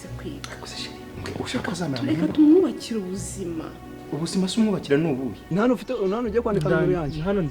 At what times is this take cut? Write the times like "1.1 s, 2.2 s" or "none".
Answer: 5.4 s